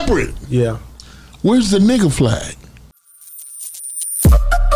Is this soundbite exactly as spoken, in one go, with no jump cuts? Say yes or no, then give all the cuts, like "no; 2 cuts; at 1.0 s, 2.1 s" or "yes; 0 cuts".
no; 1 cut; at 2.9 s